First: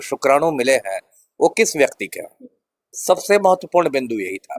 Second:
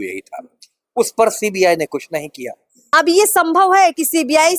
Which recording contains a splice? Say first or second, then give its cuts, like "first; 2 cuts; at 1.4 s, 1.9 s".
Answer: second; 1 cut; at 2.9 s